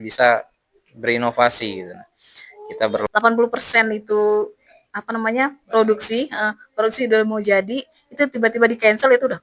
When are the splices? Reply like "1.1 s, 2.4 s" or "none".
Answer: 3.0 s